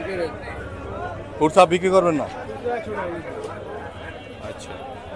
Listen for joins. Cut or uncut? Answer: uncut